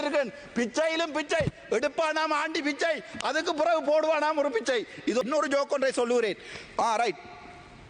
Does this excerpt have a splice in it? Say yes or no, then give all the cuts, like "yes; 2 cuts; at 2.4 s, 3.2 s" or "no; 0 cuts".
yes; 1 cut; at 5.2 s